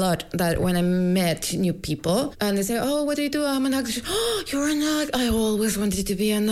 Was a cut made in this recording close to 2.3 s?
yes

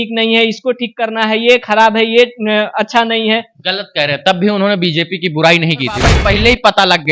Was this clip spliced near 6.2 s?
yes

